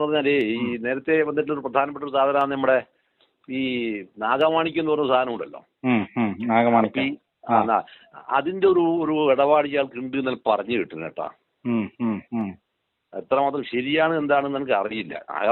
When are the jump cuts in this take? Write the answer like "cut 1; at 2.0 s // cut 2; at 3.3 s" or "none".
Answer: none